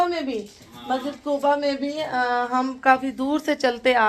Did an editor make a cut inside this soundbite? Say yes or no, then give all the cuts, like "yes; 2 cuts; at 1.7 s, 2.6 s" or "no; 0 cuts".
no; 0 cuts